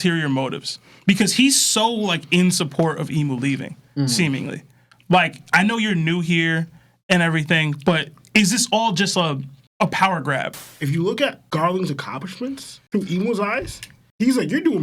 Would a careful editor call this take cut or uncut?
cut